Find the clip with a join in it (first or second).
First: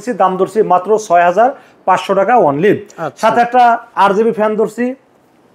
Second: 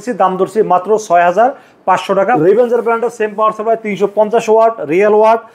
second